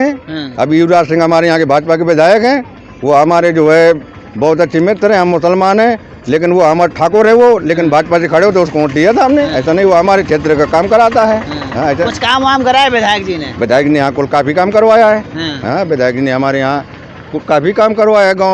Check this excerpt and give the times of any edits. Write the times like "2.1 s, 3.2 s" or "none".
none